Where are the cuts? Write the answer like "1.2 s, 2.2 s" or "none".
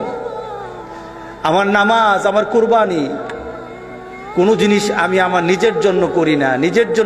none